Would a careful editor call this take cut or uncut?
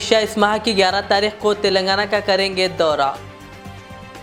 uncut